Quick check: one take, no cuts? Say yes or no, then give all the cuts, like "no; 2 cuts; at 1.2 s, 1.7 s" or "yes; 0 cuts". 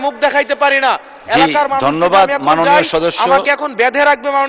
yes; 0 cuts